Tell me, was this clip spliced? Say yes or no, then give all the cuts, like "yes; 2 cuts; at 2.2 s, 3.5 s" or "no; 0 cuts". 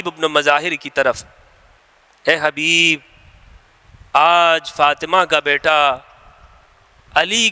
no; 0 cuts